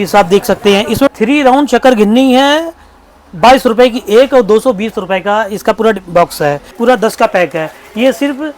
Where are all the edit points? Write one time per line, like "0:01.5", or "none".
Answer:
0:01.1
0:06.8